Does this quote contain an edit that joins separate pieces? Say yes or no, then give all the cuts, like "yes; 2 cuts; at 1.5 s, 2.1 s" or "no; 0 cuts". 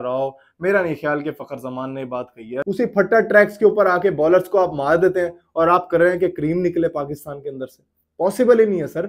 yes; 1 cut; at 2.6 s